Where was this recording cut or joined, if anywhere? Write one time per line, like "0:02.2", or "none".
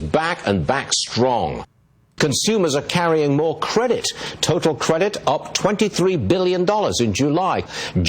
0:02.0
0:04.2